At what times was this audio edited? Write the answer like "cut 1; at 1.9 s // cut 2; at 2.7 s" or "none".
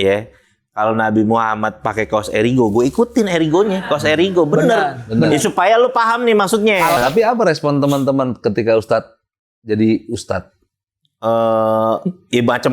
cut 1; at 7.0 s